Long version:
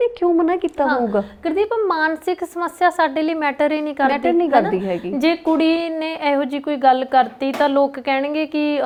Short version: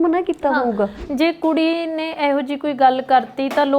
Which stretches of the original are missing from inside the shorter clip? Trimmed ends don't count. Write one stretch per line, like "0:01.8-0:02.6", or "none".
0:01.4-0:05.0